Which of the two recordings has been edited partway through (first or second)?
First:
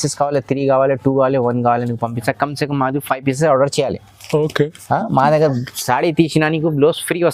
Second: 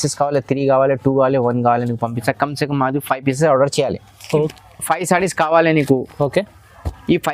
second